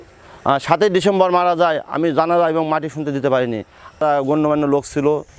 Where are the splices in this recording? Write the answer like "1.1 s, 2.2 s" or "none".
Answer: 4.0 s